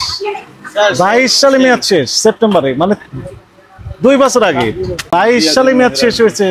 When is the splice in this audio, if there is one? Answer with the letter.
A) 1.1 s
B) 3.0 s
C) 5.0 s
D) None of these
C